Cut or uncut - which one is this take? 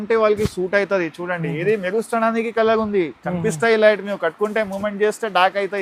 uncut